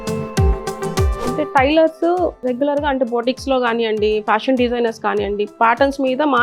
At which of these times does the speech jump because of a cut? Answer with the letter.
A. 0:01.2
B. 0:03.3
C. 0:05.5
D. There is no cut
A